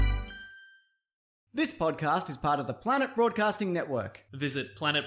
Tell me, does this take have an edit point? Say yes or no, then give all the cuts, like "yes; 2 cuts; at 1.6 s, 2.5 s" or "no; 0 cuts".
yes; 1 cut; at 1.2 s